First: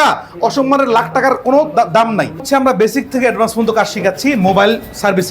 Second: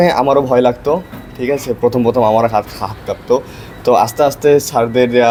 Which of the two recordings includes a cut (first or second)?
first